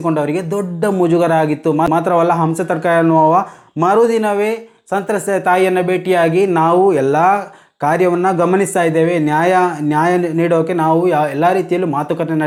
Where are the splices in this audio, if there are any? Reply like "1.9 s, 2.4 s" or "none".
none